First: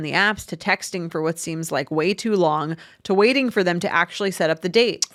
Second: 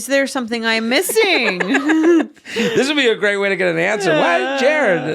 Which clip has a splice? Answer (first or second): second